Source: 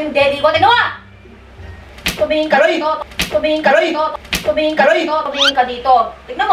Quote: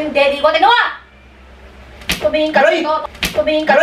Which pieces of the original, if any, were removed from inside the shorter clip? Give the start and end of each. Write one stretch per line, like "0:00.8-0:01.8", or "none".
0:02.0-0:03.1

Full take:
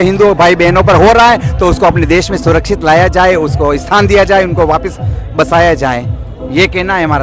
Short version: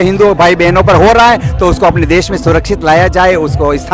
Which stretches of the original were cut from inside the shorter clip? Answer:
none

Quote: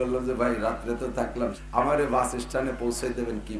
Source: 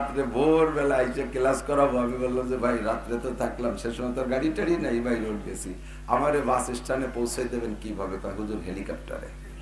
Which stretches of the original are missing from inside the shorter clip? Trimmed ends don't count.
0:03.8-0:06.0

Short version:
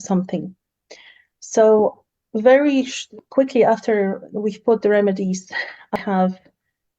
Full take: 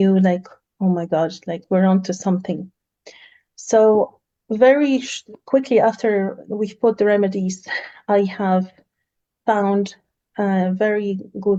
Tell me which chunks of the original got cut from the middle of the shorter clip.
0:08.1-0:08.3

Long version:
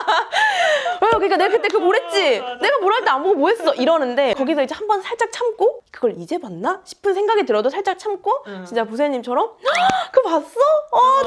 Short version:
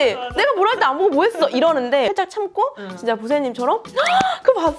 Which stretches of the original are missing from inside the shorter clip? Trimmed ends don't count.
0:04.4-0:07.8

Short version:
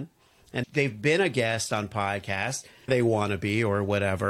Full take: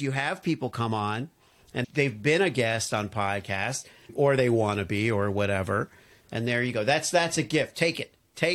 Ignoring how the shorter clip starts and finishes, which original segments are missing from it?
0:04.1-0:04.4

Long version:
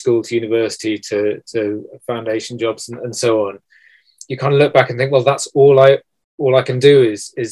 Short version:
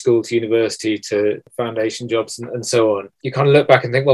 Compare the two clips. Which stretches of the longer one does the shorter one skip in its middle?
0:01.4-0:01.9
0:03.7-0:04.2

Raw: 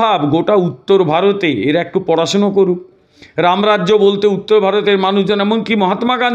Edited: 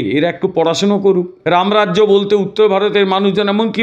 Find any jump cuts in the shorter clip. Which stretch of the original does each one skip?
0:02.9-0:03.3

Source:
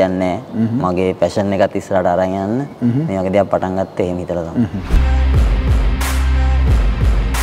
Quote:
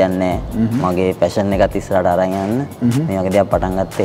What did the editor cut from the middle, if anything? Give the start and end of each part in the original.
none

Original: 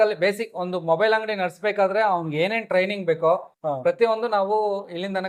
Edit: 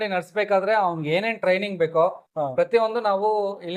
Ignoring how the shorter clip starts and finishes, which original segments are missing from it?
none

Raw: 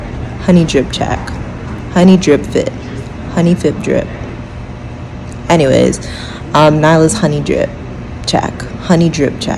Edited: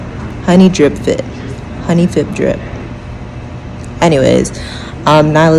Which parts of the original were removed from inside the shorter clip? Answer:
none

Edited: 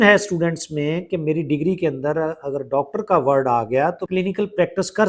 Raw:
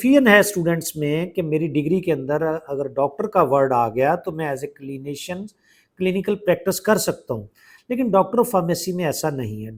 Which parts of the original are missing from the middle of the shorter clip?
0:04.3-0:05.9

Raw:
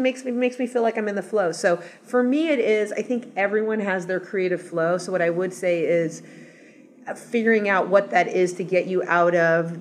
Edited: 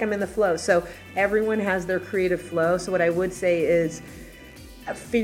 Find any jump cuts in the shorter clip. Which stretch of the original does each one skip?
0:02.0-0:03.3

